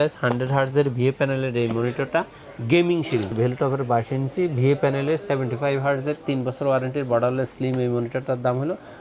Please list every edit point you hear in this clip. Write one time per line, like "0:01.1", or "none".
0:03.3